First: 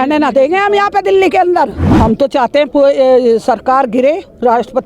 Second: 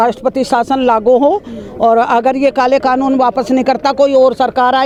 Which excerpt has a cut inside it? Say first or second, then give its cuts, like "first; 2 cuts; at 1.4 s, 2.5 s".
first; 1 cut; at 1.8 s